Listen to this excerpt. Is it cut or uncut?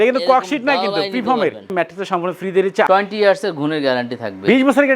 cut